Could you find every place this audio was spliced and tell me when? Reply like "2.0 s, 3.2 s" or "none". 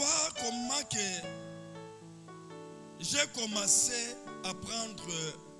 none